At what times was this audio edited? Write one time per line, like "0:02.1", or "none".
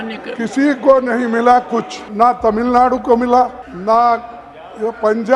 0:02.0
0:03.7